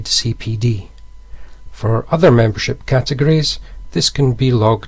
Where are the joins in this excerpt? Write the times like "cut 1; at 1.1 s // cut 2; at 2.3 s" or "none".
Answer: none